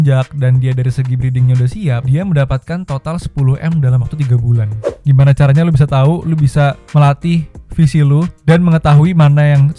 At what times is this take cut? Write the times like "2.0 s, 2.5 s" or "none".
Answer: 4.8 s